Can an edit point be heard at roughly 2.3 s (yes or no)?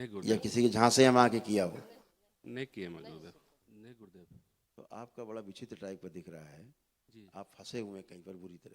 no